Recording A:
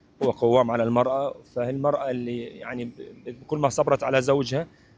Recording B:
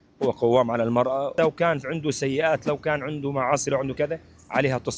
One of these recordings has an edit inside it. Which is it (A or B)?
B